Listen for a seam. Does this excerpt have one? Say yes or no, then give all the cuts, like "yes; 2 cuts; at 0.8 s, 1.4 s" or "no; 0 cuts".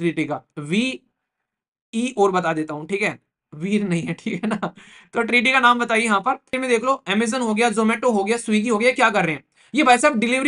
yes; 1 cut; at 6.5 s